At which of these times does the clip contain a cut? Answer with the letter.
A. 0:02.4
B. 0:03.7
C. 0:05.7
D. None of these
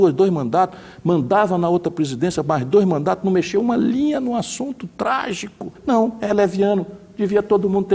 C